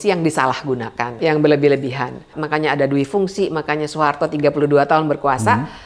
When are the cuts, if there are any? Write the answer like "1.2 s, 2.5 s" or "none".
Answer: 1.1 s, 2.3 s